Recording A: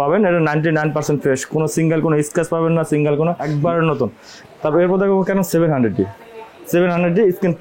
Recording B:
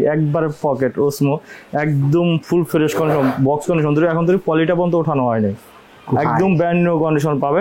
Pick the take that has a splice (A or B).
A